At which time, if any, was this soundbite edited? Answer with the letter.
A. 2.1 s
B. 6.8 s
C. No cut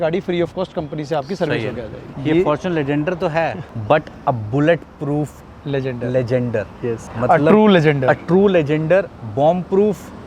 A